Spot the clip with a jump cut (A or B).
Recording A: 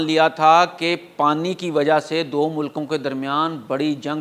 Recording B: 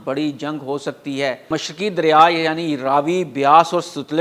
B